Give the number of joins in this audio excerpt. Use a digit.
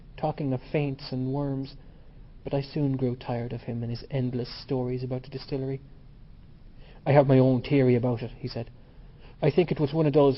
0